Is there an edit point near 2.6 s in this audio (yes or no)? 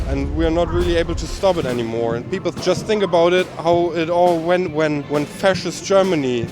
yes